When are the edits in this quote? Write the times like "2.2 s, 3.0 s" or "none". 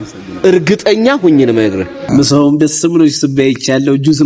2.0 s